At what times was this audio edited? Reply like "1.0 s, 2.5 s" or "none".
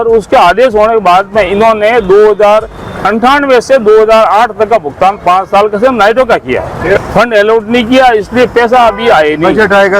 7.0 s